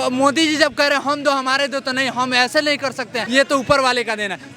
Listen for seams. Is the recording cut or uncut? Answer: cut